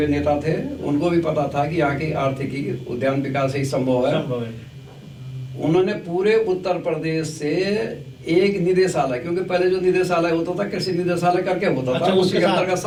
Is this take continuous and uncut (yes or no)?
yes